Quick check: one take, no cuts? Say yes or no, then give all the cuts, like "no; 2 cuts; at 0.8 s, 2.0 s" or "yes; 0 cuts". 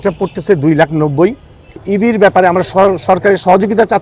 no; 1 cut; at 1.8 s